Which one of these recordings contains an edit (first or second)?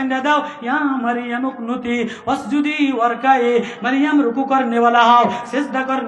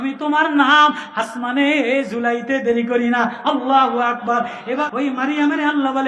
second